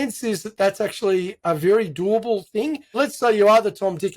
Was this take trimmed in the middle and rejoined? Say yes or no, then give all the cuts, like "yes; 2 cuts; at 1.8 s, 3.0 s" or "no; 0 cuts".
yes; 2 cuts; at 1.4 s, 3.0 s